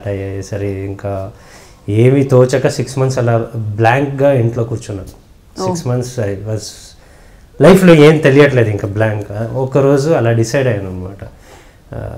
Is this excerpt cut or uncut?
uncut